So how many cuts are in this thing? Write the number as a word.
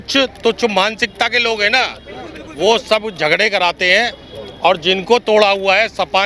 zero